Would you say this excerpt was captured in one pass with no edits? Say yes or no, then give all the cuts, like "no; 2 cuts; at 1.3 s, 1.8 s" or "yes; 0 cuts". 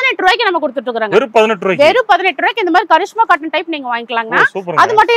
yes; 0 cuts